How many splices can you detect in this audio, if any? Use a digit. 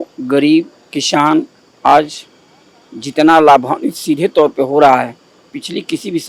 0